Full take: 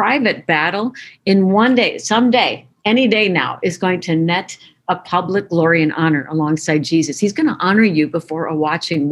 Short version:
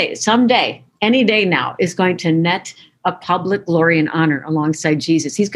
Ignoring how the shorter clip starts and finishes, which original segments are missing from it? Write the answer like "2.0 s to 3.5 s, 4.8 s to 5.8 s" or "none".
none